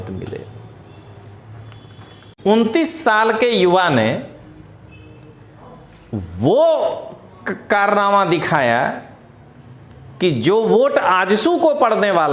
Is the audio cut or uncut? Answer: cut